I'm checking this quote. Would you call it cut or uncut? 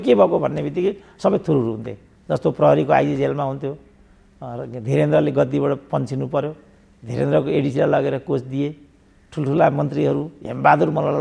uncut